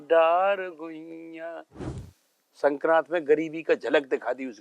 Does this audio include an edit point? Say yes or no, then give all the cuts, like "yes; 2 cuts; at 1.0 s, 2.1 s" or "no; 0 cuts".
yes; 1 cut; at 1.8 s